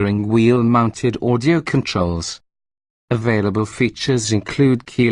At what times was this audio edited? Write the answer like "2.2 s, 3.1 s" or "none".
3.1 s